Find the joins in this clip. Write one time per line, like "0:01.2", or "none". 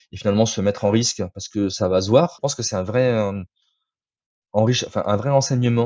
0:02.3